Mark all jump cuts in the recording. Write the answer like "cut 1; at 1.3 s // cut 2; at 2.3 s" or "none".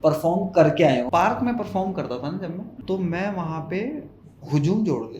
cut 1; at 1.1 s // cut 2; at 2.7 s